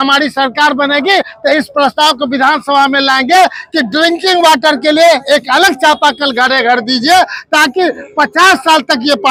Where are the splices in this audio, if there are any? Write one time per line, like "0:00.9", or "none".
none